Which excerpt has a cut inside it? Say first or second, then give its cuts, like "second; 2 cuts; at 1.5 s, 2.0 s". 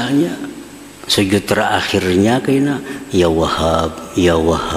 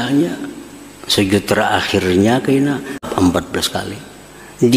second; 1 cut; at 3.1 s